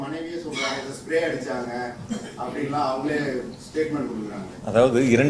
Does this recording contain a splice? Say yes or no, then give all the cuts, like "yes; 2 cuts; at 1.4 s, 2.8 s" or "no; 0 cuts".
no; 0 cuts